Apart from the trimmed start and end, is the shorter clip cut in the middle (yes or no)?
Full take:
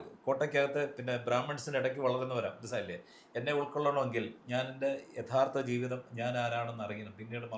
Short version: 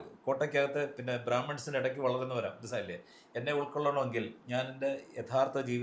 no